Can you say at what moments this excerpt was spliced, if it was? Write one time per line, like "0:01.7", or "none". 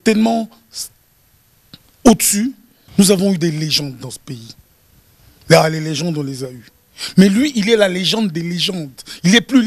0:02.8